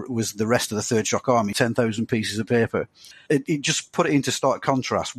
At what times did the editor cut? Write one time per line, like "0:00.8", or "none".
0:01.5
0:03.2

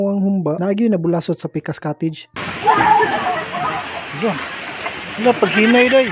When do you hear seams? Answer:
none

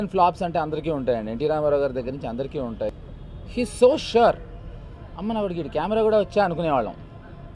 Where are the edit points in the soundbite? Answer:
0:03.0

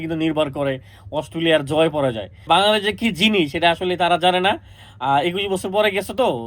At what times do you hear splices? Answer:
0:02.5

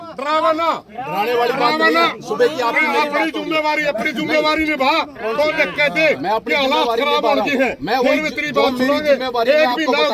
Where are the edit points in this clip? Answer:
none

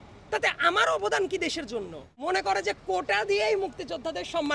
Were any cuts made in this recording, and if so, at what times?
0:02.1

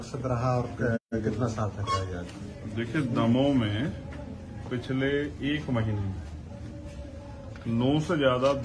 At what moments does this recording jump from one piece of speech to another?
0:01.0

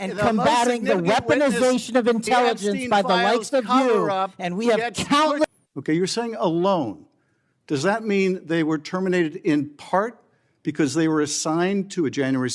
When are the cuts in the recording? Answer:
0:05.4

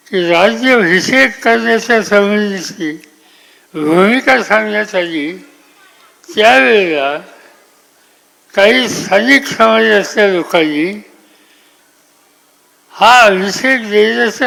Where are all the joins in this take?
none

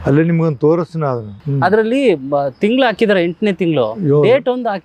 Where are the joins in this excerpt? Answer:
0:01.4

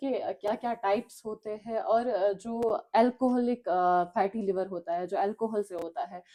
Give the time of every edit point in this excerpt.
none

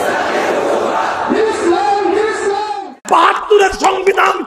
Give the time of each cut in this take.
0:02.8

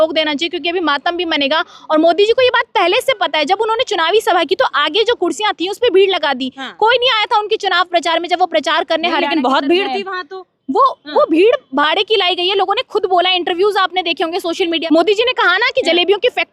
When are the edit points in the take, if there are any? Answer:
0:14.8

